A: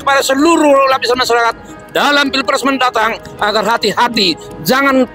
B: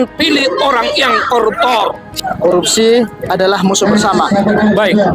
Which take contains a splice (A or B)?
B